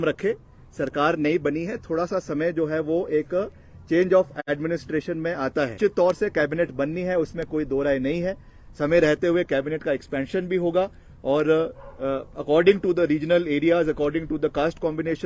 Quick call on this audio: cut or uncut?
cut